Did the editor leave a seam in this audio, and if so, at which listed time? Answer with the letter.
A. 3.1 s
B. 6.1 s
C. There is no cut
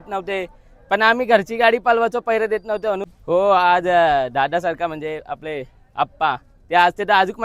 A